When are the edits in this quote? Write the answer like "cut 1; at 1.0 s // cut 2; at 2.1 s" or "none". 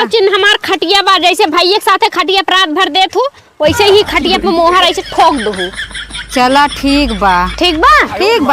none